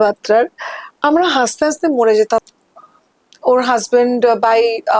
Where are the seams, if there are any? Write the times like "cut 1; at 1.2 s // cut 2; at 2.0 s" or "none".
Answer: cut 1; at 2.4 s